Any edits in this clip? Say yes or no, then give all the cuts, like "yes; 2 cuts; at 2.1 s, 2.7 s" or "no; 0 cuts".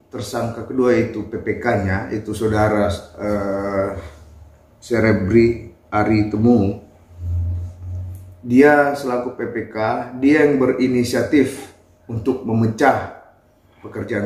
no; 0 cuts